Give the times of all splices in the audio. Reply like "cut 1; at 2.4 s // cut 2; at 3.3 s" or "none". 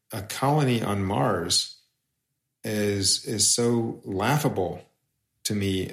none